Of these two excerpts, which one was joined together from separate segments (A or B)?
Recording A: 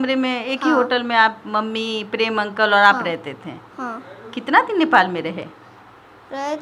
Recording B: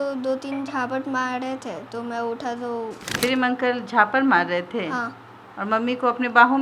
B